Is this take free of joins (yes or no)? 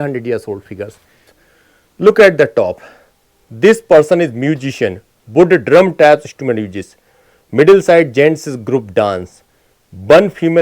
no